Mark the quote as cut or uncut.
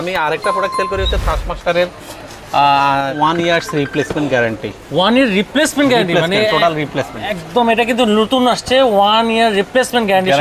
cut